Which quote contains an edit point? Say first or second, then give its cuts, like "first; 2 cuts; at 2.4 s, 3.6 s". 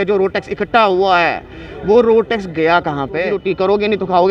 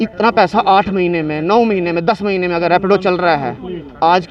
first; 1 cut; at 3.4 s